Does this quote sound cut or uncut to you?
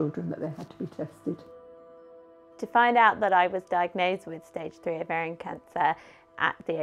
cut